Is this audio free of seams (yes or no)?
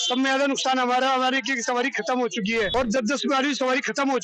no